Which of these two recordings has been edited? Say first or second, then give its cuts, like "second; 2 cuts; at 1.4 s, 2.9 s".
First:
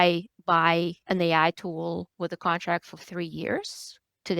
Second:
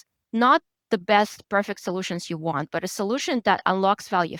first; 2 cuts; at 1.0 s, 2.1 s